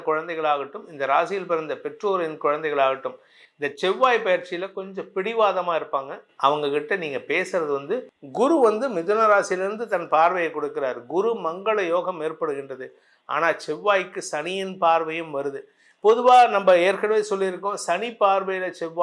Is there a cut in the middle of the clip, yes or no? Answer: yes